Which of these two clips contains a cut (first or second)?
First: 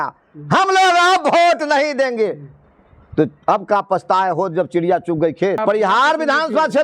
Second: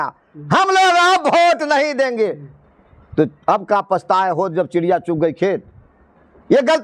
first